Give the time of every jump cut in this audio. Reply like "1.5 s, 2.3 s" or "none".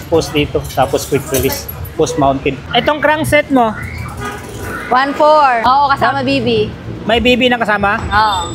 2.8 s, 5.6 s